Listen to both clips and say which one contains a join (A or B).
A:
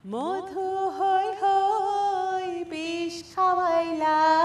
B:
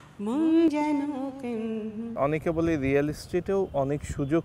B